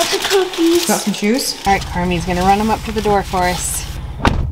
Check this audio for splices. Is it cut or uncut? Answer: cut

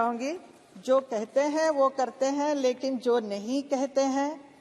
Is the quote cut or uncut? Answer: uncut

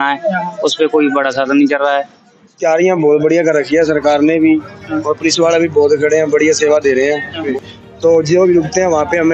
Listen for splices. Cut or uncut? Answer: cut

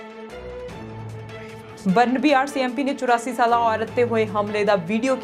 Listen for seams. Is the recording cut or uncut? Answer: cut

